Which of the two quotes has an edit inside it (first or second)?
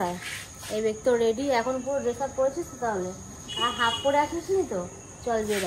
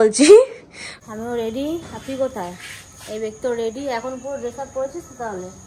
second